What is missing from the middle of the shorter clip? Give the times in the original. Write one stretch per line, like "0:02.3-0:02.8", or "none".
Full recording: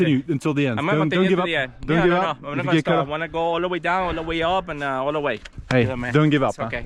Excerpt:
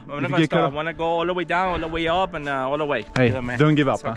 0:05.4-0:05.6